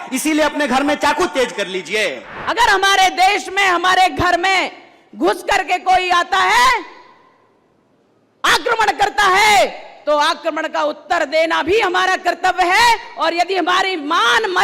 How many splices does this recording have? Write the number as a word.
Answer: one